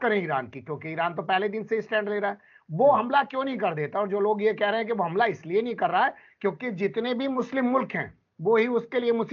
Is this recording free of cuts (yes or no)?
yes